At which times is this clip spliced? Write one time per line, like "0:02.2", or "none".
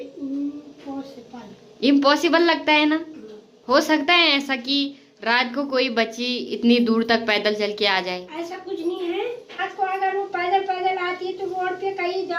none